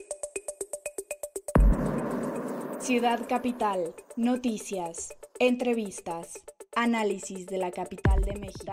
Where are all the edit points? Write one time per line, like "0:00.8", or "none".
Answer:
0:01.5